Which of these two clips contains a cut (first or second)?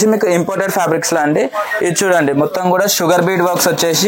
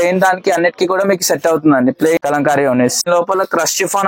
second